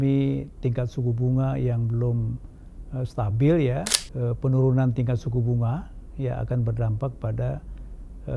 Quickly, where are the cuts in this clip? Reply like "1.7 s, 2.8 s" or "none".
4.0 s

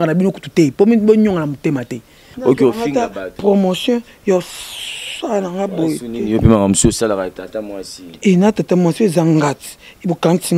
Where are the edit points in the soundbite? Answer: 2.3 s

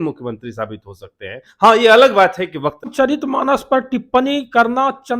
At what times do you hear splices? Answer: 2.9 s

